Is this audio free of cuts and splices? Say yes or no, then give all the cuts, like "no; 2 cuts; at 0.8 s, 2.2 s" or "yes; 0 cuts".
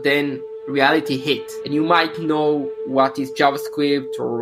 yes; 0 cuts